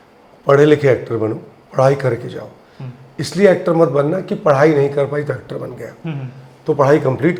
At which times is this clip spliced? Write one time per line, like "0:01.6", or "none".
none